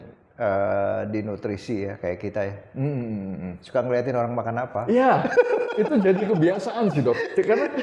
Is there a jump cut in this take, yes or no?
no